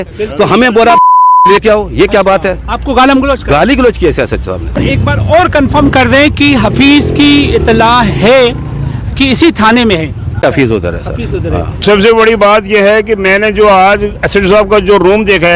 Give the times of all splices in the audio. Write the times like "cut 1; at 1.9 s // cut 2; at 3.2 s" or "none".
cut 1; at 4.7 s // cut 2; at 11.7 s